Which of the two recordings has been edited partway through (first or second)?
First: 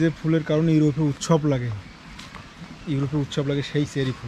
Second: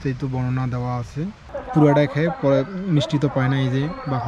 second